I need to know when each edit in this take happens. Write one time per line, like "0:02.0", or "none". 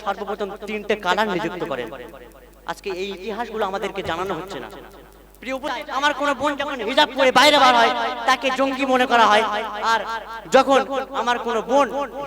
0:05.7